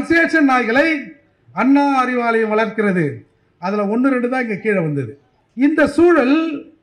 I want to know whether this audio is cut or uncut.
uncut